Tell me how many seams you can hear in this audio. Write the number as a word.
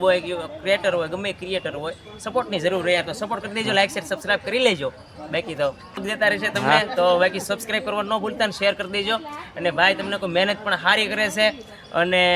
one